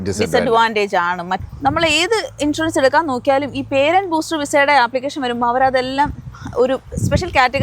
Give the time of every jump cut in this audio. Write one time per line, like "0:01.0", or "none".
0:01.4